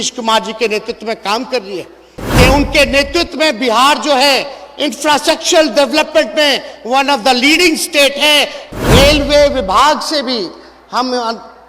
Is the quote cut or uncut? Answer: cut